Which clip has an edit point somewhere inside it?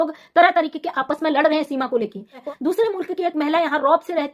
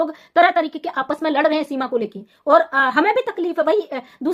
first; 1 cut; at 2.4 s

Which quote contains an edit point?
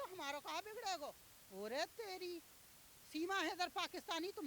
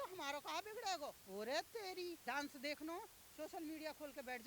second; 2 cuts; at 1.2 s, 2.2 s

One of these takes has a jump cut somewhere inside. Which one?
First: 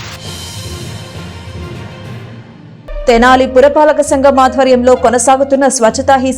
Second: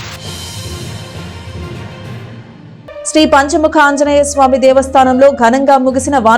second; 1 cut; at 2.6 s

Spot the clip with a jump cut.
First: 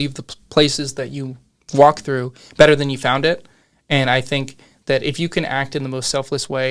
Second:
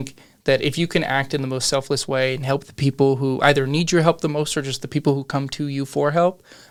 first; 1 cut; at 1.5 s

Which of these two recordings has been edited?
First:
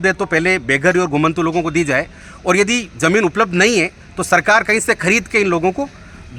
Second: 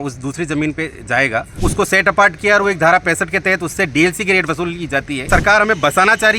second; 2 cuts; at 1.5 s, 5.2 s

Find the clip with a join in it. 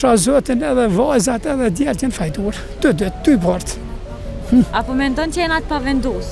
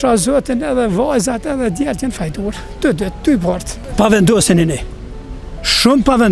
second; 1 cut; at 3.8 s

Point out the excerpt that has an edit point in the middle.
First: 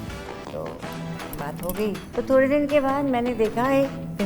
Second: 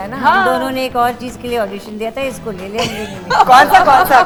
first; 1 cut; at 2.0 s

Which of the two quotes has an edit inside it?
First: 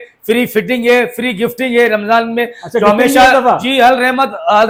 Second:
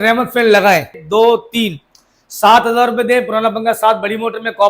second; 1 cut; at 1.0 s

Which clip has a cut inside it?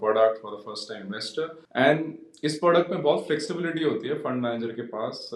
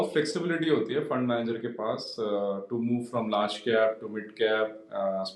first; 1 cut; at 1.6 s

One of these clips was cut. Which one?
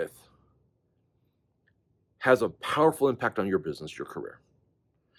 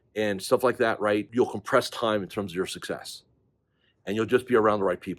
second; 1 cut; at 1.3 s

